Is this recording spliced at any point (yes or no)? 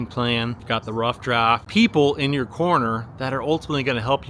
yes